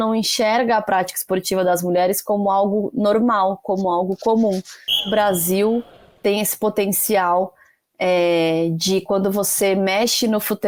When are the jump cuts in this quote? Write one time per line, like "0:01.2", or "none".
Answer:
0:05.1

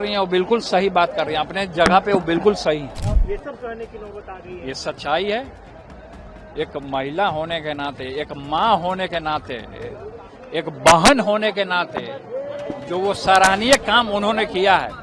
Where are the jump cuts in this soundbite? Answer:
0:03.2

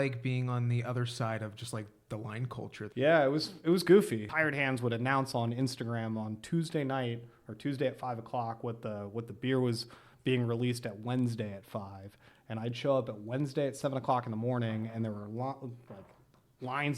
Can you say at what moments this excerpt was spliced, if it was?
0:02.8
0:04.2

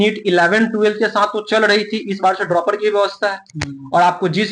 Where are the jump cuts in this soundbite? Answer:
none

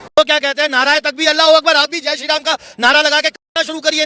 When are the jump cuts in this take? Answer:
none

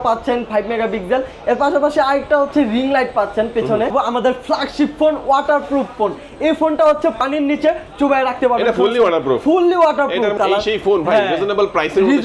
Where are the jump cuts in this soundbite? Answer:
0:03.9
0:07.2
0:10.3

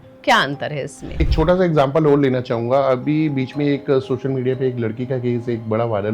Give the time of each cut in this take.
0:01.2

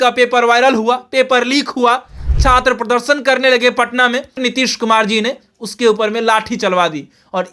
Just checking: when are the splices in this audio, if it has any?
0:04.4

